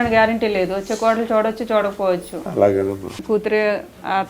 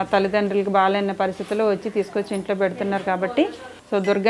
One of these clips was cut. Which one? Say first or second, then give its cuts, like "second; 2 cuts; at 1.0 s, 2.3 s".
first; 1 cut; at 3.2 s